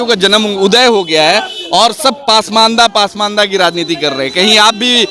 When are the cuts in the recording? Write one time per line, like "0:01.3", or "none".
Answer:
none